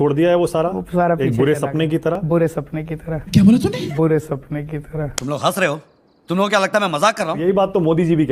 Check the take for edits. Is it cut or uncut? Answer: uncut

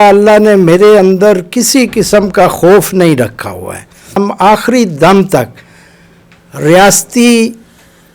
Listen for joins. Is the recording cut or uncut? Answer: cut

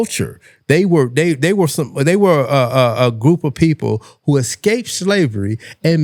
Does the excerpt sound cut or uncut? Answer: uncut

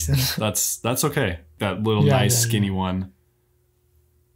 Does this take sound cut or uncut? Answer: cut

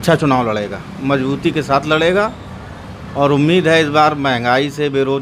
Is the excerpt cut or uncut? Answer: uncut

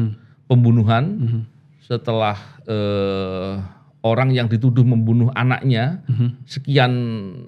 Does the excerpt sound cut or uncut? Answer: uncut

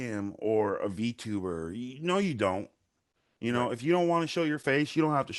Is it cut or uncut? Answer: uncut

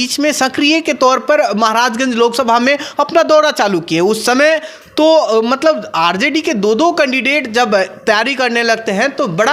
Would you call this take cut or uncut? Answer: uncut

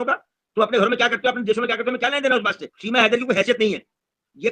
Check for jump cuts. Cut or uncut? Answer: cut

